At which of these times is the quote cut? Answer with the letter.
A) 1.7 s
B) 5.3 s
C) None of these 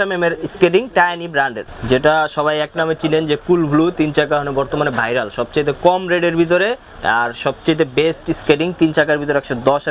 A